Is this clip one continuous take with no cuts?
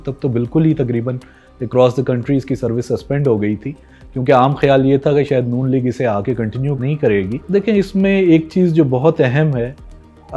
no; 1 cut; at 7.3 s

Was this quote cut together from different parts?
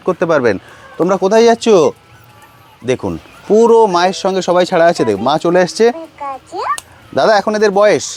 no; 0 cuts

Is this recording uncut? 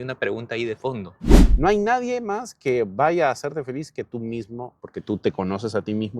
no; 2 cuts; at 1.4 s, 4.8 s

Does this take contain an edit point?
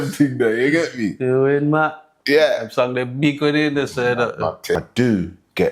yes; 1 cut; at 4.8 s

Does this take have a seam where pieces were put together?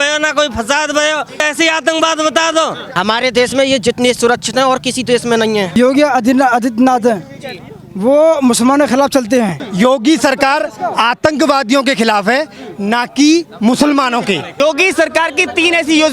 yes; 5 cuts; at 1.5 s, 2.8 s, 5.8 s, 9.6 s, 14.5 s

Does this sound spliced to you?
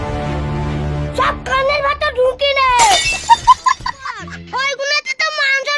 yes; 1 cut; at 4.3 s

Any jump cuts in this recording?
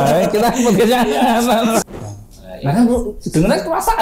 yes; 1 cut; at 1.8 s

